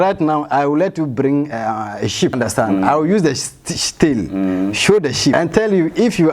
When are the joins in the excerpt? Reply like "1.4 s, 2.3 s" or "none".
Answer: 2.3 s, 5.3 s